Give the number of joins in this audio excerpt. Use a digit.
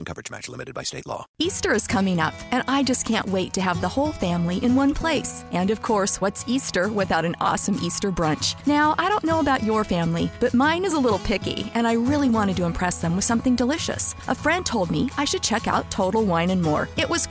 1